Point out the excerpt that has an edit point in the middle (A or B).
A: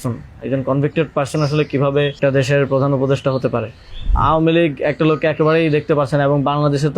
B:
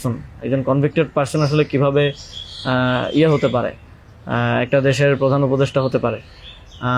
A